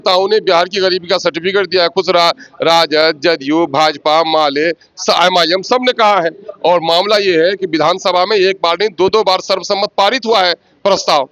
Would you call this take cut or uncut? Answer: uncut